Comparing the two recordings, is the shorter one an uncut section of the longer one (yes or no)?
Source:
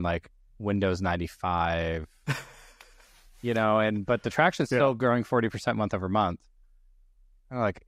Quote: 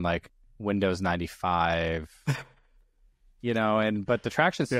yes